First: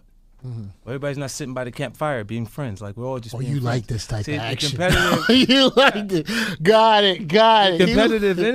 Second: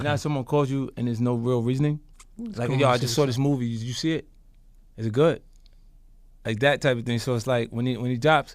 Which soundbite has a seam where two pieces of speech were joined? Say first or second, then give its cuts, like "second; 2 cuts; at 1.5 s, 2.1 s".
second; 1 cut; at 2.2 s